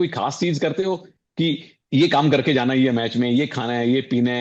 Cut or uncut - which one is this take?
uncut